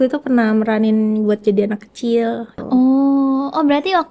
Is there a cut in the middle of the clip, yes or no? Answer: yes